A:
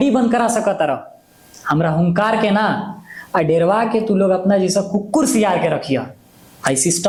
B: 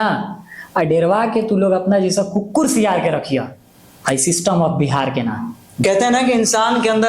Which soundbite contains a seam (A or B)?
B